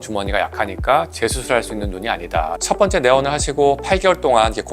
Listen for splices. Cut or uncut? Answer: cut